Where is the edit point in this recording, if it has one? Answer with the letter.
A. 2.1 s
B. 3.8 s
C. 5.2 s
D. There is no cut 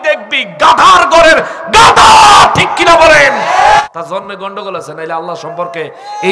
B